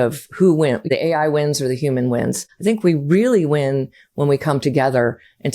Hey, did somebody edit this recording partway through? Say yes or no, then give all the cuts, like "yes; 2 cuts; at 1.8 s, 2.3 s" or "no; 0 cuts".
yes; 2 cuts; at 0.9 s, 2.5 s